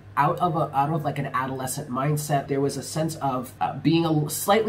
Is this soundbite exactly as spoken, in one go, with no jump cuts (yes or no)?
no